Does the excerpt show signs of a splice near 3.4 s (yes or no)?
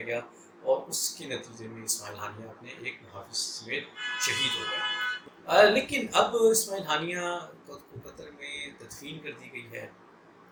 no